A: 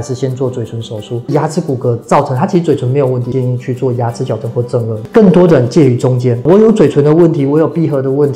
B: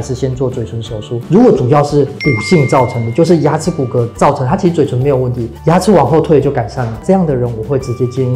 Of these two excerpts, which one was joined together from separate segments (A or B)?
A